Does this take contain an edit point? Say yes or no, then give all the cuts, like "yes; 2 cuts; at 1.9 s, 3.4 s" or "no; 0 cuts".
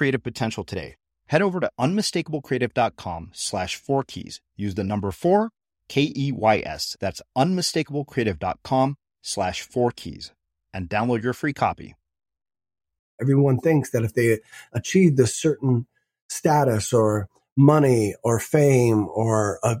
yes; 1 cut; at 13.2 s